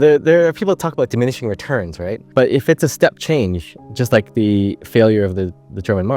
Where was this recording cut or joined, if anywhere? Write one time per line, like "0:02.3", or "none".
none